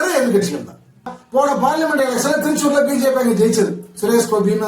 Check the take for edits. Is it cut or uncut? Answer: cut